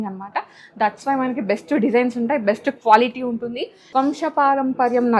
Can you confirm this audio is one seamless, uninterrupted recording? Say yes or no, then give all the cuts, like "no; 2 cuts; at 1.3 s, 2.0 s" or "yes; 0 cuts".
no; 1 cut; at 3.8 s